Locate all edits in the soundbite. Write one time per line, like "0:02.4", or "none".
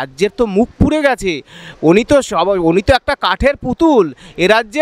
none